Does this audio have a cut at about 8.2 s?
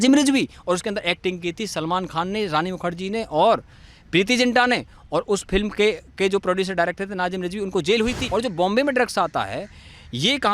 yes; 1 cut; at 8.2 s

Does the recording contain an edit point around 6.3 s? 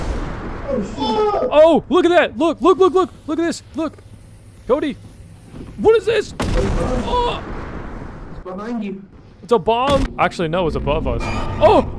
no; 1 cut; at 10.1 s

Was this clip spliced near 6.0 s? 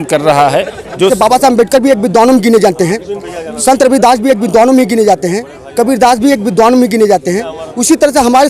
no; 1 cut; at 1.1 s

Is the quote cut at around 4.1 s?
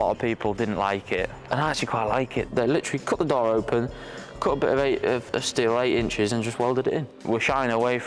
no; 4 cuts; at 1.4 s, 2.5 s, 5.3 s, 7.2 s

